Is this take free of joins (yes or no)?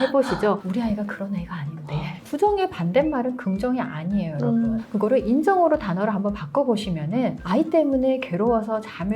no